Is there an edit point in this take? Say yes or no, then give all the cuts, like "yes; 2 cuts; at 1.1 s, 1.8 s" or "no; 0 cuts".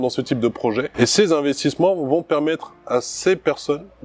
yes; 1 cut; at 0.9 s